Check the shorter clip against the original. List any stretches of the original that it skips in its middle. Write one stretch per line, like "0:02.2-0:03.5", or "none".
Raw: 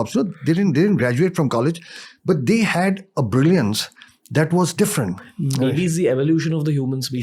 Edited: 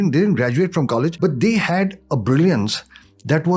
0:01.8-0:02.2